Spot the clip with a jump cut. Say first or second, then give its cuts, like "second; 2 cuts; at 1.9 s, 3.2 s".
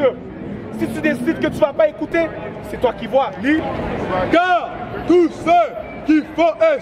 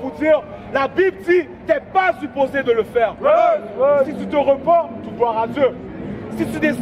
first; 1 cut; at 3.7 s